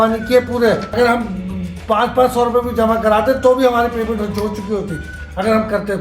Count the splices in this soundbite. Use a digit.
1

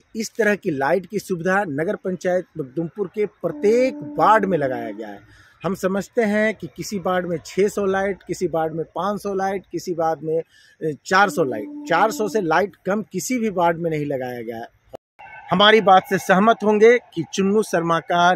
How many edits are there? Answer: 1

